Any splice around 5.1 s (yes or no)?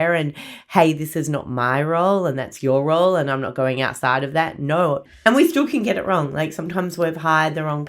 yes